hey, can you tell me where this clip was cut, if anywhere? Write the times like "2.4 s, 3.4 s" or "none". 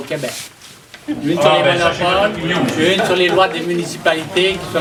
none